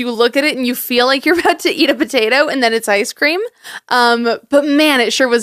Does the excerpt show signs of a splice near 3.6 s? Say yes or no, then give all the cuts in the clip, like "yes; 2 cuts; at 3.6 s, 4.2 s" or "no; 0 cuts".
no; 0 cuts